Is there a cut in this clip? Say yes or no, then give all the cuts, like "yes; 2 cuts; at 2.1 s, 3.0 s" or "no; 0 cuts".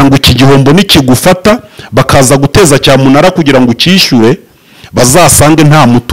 no; 0 cuts